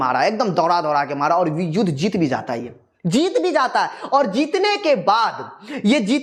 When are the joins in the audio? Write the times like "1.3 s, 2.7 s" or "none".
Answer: none

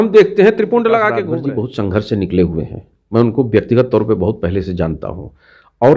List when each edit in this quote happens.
1.2 s

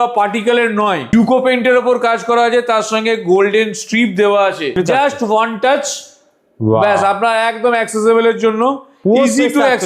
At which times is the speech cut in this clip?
1.1 s, 4.8 s

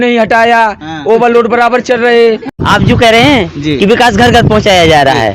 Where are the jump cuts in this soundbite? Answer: 2.5 s

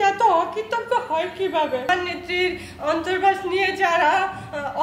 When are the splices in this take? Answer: 1.9 s

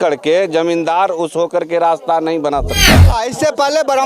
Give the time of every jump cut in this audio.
3.1 s

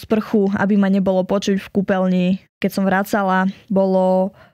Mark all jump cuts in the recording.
2.5 s, 3.6 s

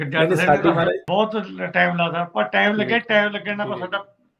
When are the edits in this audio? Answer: 1.0 s

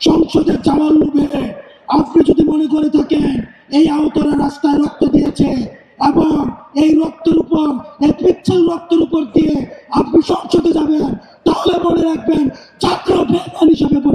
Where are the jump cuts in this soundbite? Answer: none

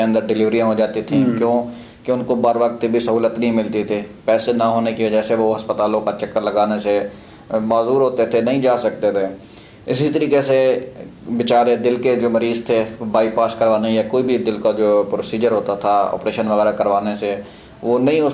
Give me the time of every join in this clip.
none

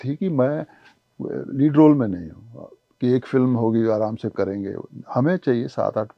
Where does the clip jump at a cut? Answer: none

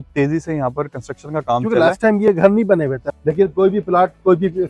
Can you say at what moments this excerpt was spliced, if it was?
3.1 s

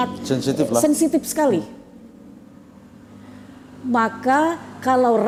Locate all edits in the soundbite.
none

